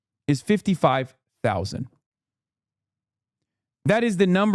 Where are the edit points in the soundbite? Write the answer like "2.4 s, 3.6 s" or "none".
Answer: none